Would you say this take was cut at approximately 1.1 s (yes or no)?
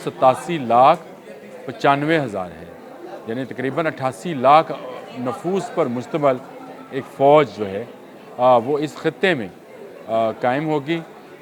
no